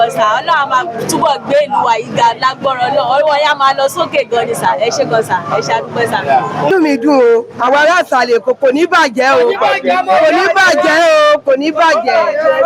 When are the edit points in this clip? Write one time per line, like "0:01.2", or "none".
0:06.7